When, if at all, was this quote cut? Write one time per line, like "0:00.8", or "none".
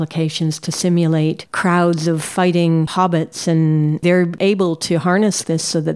none